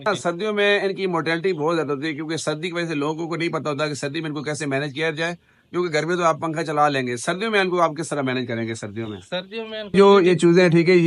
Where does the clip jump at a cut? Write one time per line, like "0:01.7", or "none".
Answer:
0:09.9